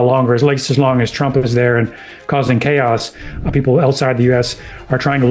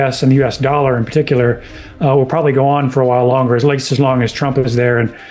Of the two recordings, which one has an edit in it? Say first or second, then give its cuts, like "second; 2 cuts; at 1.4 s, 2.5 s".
first; 1 cut; at 3.5 s